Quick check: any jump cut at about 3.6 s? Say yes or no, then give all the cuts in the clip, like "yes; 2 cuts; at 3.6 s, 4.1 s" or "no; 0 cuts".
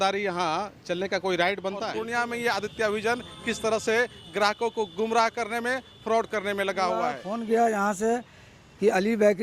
no; 2 cuts; at 2.0 s, 7.3 s